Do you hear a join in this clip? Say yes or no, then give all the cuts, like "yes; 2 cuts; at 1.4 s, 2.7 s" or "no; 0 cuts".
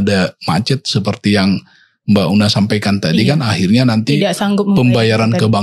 no; 0 cuts